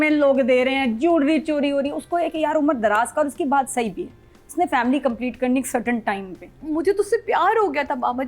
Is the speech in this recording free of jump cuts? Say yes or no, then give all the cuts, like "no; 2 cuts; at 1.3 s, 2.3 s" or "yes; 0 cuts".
no; 1 cut; at 6.6 s